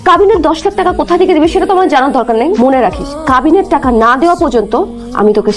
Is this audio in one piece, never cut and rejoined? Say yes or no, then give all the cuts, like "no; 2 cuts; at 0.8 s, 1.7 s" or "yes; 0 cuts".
yes; 0 cuts